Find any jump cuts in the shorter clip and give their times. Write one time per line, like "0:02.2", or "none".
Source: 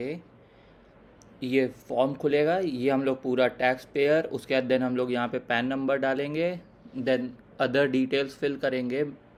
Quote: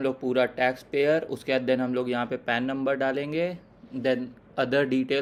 none